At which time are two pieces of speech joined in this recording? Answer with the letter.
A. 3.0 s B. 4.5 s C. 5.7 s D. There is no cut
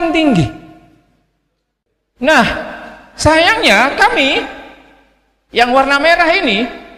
D